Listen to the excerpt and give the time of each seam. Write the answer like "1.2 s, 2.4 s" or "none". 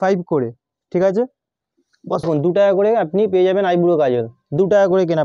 none